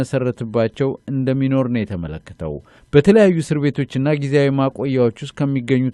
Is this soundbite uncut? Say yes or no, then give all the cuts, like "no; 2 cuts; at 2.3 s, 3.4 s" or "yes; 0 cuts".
no; 1 cut; at 1.1 s